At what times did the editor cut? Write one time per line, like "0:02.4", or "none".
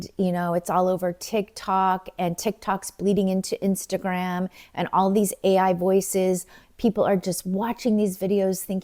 none